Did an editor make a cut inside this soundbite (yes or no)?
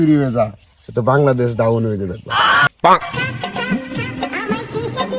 yes